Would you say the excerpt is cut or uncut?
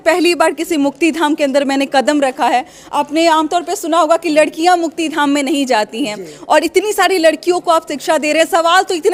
uncut